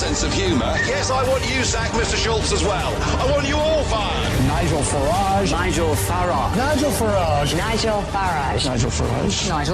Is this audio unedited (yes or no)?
yes